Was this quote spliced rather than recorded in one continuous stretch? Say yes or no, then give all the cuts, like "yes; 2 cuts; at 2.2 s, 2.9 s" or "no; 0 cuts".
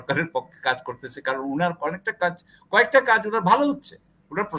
no; 0 cuts